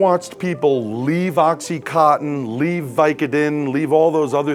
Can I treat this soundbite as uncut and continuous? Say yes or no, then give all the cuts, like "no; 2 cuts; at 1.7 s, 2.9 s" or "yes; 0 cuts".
yes; 0 cuts